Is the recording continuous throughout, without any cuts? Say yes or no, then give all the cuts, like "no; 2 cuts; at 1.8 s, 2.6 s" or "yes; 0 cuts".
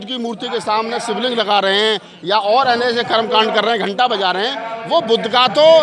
yes; 0 cuts